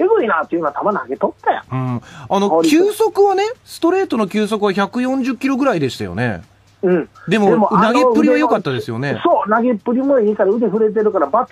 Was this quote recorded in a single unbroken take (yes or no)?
no